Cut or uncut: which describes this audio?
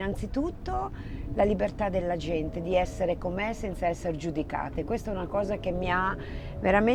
uncut